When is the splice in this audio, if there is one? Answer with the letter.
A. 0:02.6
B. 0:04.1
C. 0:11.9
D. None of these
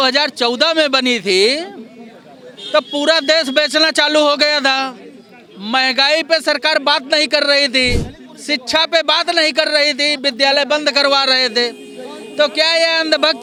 D